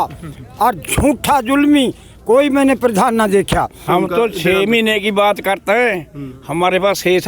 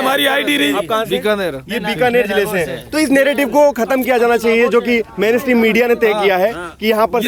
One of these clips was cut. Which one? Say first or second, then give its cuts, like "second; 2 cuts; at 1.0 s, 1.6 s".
first; 1 cut; at 3.8 s